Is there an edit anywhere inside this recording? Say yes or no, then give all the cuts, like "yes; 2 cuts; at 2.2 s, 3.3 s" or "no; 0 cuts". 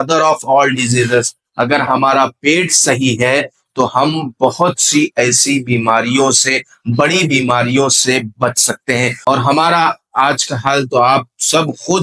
yes; 1 cut; at 9.2 s